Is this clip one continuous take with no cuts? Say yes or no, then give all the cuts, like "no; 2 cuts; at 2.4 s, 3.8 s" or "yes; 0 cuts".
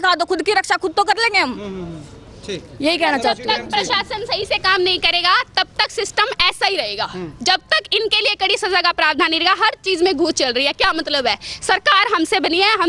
yes; 0 cuts